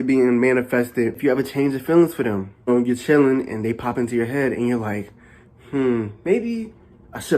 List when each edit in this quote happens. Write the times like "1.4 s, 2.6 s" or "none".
1.2 s, 2.7 s